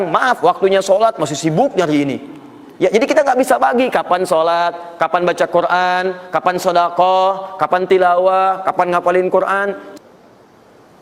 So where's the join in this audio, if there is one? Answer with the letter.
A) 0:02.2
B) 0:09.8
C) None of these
B